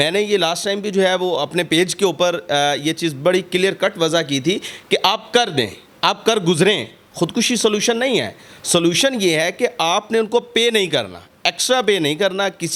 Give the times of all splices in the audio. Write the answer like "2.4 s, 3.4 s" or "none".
none